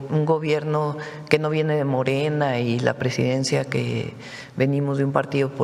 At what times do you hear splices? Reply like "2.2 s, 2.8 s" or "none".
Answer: none

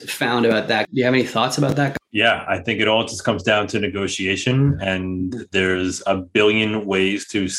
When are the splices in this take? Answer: 0.8 s, 1.9 s

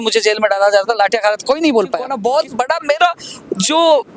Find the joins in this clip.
2.1 s

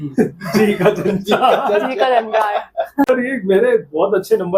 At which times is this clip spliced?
3.1 s

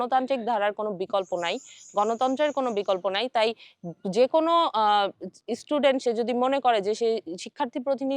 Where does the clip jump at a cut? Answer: none

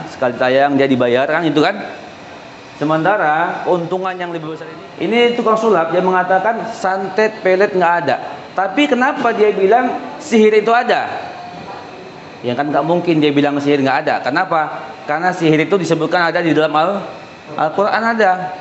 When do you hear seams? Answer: 4.5 s

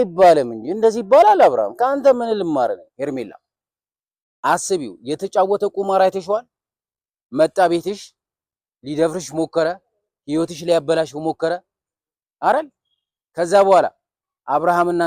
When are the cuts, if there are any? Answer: 2.9 s

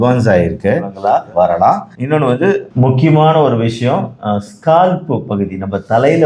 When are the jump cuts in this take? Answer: 0.9 s

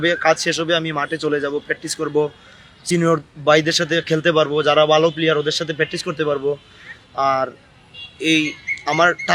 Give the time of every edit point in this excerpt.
none

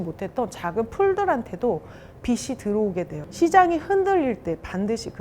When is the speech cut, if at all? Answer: 3.2 s

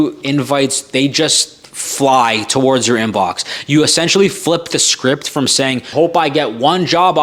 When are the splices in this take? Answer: none

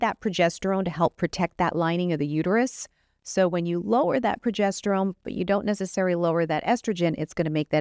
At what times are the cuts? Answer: none

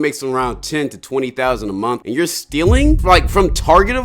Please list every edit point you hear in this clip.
3.0 s

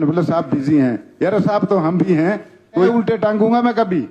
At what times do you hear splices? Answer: 2.9 s

